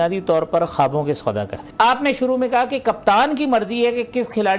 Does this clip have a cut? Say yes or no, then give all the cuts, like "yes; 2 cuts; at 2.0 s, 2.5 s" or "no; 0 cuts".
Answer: yes; 1 cut; at 1.6 s